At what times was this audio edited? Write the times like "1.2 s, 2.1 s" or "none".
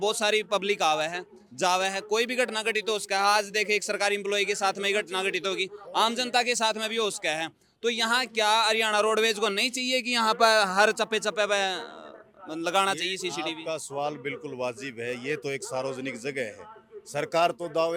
none